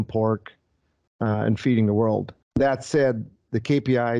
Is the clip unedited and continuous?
no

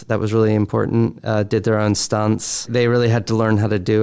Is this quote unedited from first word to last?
no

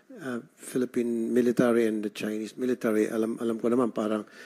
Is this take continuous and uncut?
yes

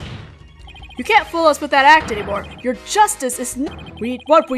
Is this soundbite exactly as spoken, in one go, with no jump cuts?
yes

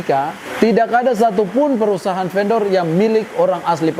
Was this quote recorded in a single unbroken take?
yes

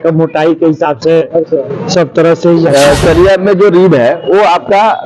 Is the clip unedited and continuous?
no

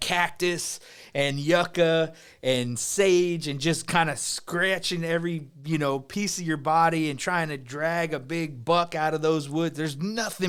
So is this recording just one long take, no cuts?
yes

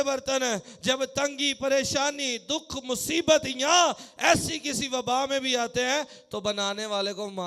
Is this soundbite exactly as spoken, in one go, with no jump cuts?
yes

